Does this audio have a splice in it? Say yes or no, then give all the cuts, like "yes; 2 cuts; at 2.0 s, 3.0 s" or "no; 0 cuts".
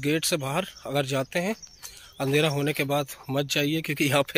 no; 0 cuts